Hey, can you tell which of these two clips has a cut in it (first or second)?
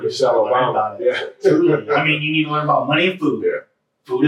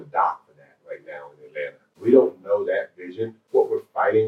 second